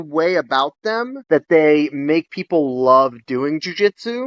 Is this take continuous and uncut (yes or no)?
yes